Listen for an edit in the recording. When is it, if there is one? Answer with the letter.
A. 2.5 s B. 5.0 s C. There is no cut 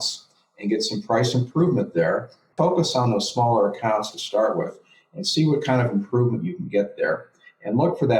A